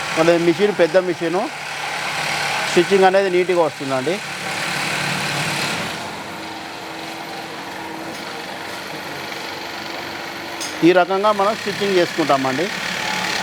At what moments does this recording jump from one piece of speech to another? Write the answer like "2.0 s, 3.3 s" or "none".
none